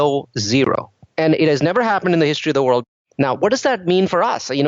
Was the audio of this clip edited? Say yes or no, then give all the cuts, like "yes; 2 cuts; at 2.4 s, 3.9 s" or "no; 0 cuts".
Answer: yes; 2 cuts; at 1.0 s, 2.9 s